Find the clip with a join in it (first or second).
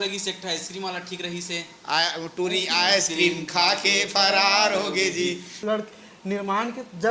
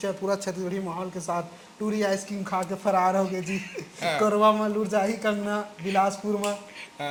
first